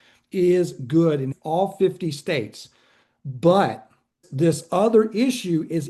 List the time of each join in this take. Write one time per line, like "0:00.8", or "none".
0:01.3
0:04.2